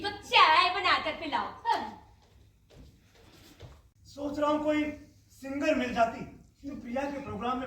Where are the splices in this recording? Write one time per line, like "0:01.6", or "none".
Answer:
0:03.9

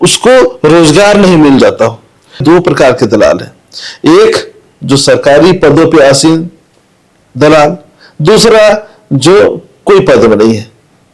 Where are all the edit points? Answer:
0:02.4

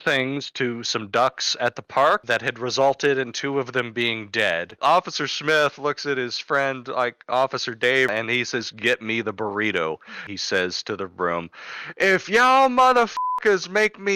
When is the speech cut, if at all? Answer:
0:04.8
0:08.1
0:10.1

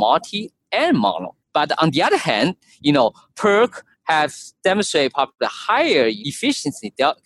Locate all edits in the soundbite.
0:01.4
0:06.2

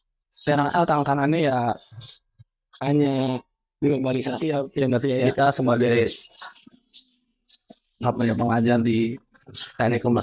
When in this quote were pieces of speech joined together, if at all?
0:05.2

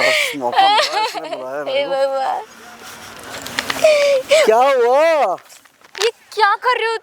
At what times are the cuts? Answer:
none

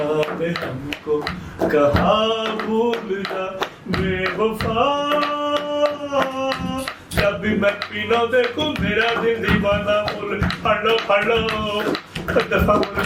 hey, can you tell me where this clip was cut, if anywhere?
none

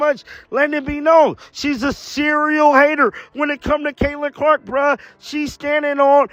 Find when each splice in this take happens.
none

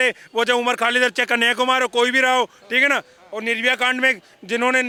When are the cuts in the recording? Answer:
none

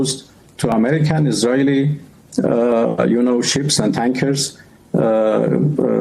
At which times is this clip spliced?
none

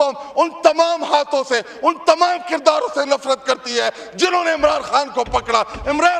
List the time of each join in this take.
none

